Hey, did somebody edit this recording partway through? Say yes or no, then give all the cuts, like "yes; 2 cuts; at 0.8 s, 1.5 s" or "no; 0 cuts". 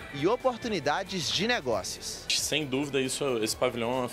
yes; 1 cut; at 2.4 s